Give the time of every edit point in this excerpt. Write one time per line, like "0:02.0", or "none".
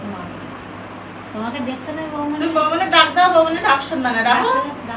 none